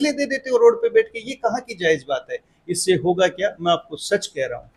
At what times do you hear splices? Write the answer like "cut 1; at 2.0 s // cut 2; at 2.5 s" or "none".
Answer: none